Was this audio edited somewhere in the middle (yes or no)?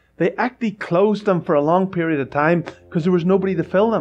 no